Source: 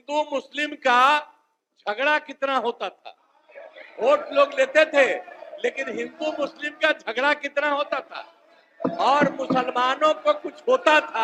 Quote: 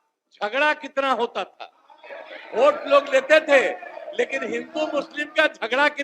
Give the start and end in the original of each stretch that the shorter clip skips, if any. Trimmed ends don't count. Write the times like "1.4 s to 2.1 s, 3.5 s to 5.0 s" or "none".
none

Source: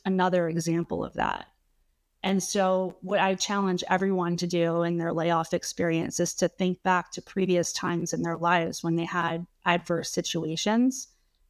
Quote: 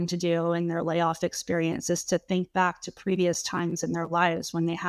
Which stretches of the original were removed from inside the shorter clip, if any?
none

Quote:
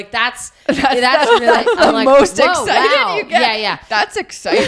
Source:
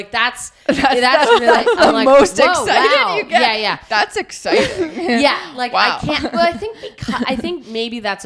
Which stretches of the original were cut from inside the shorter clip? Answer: none

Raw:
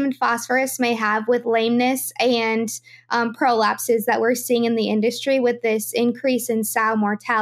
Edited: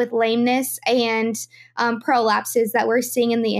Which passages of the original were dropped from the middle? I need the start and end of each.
none

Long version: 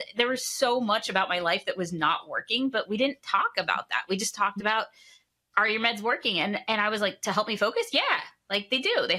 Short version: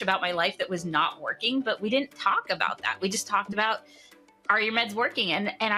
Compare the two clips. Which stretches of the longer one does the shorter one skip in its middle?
none

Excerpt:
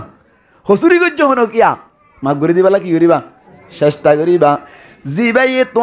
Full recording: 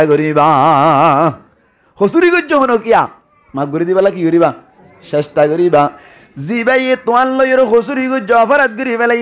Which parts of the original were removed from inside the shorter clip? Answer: none

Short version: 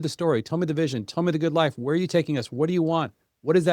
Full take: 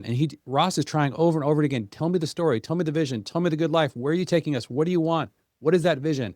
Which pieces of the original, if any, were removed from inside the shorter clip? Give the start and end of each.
none

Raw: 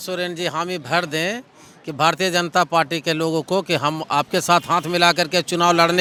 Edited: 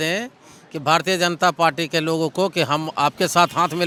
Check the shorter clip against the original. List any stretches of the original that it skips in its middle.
none

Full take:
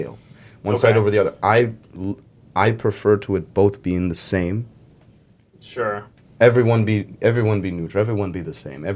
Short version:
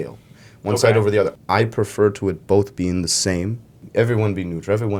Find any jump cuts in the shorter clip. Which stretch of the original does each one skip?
1.3 s to 2.4 s, 4.9 s to 7.1 s

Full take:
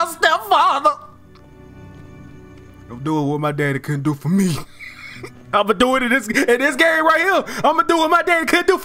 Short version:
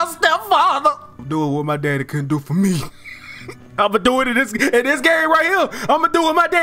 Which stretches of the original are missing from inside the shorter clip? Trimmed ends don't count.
1.1 s to 2.9 s

